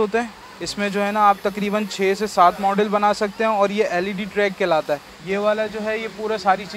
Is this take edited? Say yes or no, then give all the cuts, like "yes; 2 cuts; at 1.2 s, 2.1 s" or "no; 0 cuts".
yes; 1 cut; at 5.1 s